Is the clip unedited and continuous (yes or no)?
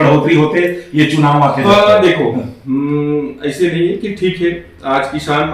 yes